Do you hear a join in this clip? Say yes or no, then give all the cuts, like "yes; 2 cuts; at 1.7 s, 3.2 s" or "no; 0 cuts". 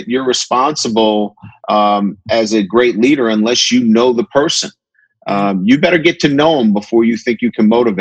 no; 0 cuts